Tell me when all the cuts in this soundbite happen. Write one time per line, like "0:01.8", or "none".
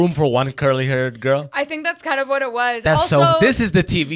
none

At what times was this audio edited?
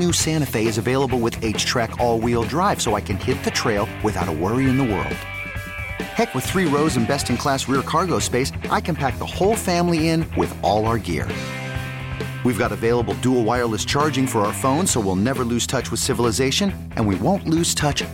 none

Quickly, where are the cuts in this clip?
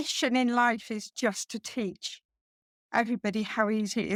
none

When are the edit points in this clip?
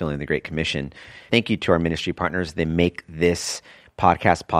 0:01.3

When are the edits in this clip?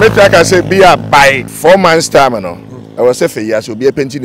0:01.5

